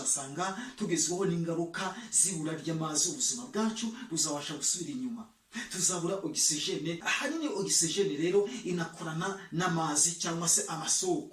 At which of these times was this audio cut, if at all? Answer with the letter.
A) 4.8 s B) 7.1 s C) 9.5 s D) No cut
B